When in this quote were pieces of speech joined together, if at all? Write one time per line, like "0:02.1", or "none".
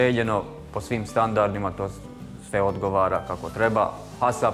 none